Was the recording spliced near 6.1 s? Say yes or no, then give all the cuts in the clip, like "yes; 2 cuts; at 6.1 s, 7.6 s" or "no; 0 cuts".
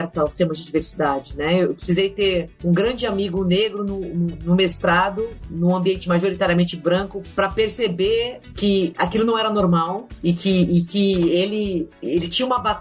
no; 0 cuts